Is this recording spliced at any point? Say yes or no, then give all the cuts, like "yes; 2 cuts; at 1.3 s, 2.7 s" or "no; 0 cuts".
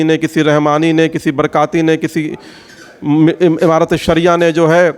no; 0 cuts